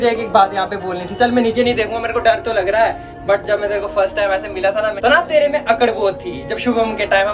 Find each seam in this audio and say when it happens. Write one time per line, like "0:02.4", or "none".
none